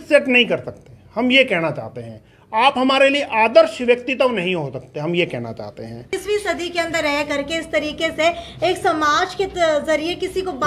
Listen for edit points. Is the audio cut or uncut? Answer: cut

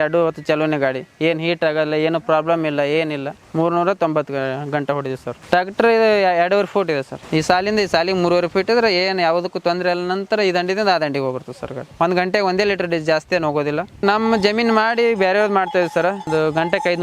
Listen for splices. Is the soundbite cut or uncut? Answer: cut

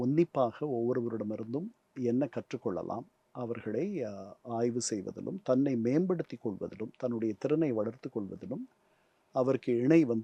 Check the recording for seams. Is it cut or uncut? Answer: uncut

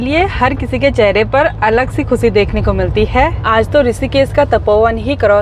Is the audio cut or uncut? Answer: cut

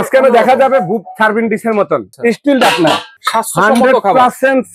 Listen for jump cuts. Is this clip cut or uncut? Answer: cut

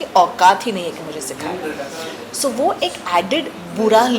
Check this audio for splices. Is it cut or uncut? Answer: uncut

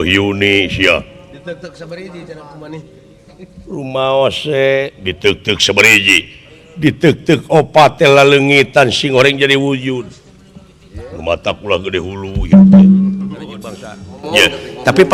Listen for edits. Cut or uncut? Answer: cut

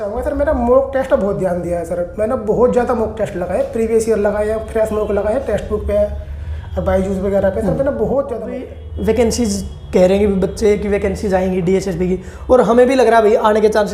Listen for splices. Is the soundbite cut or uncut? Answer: cut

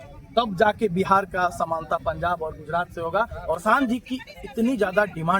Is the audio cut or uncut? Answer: cut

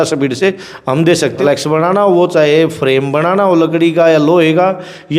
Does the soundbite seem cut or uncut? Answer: cut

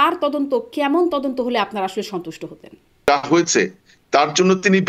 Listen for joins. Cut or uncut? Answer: cut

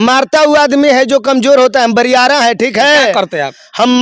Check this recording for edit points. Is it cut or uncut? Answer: uncut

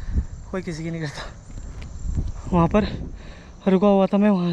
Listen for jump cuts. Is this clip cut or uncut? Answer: uncut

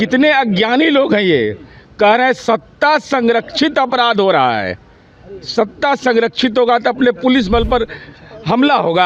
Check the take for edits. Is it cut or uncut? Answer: uncut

